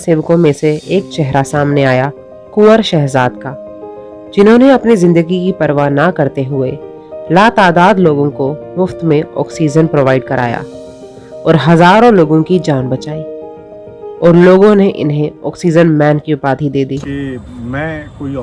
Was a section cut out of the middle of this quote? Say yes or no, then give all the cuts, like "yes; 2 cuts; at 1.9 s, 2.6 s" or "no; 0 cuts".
yes; 1 cut; at 17.0 s